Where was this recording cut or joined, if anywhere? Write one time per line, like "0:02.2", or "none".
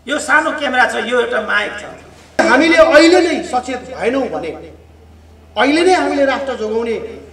0:02.4